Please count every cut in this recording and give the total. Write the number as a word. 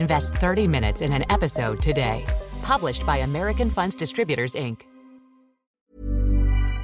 one